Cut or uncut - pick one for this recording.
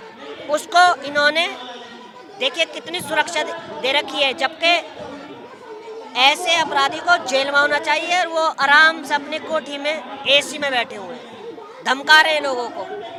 uncut